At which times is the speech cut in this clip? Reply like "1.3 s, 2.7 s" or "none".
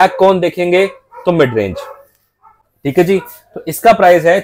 none